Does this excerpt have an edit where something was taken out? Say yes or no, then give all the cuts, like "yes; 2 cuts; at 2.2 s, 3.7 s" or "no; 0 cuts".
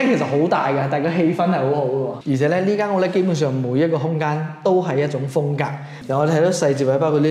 yes; 2 cuts; at 2.2 s, 5.9 s